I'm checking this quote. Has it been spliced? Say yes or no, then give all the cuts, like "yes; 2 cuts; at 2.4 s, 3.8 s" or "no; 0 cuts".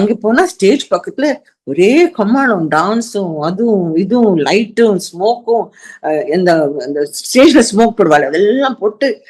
no; 0 cuts